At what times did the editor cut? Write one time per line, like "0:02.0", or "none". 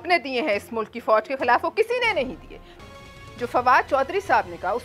0:02.6